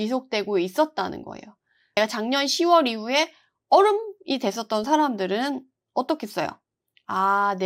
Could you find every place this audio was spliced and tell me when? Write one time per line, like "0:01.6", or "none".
0:02.0